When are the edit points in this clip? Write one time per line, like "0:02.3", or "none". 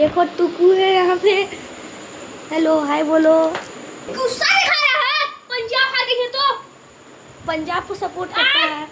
0:04.1